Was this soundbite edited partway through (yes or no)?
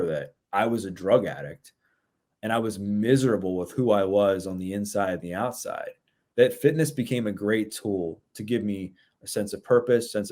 no